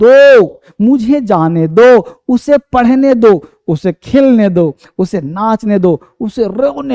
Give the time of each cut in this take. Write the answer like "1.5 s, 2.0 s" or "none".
none